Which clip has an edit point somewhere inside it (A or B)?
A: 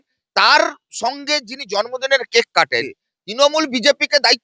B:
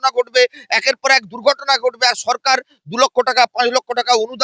A